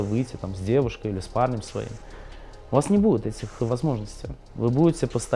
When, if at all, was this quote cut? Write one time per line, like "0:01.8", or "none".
none